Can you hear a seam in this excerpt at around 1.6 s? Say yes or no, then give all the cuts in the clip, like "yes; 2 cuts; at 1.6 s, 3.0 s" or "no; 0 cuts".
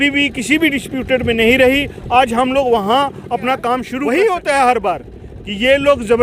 no; 1 cut; at 3.9 s